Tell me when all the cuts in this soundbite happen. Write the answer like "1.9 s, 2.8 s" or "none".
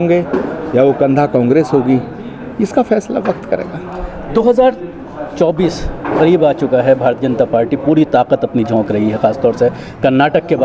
none